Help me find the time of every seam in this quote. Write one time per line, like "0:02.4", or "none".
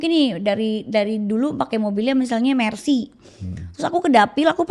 none